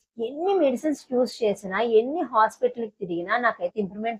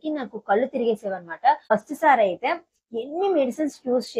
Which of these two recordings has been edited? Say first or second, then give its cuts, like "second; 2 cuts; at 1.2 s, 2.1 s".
second; 1 cut; at 1.7 s